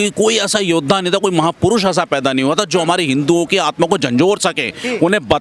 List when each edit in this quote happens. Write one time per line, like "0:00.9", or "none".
none